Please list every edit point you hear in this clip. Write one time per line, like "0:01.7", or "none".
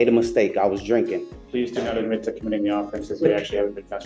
0:01.3